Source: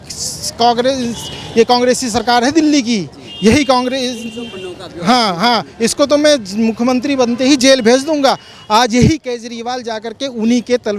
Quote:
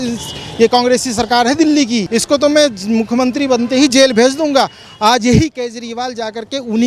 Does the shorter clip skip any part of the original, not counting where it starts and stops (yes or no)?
yes